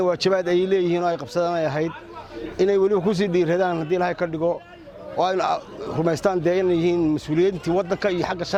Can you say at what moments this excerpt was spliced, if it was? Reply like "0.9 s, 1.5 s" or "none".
none